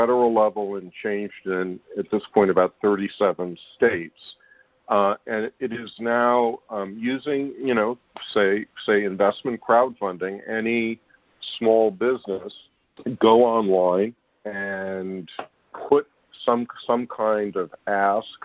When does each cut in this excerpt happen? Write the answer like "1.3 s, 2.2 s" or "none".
none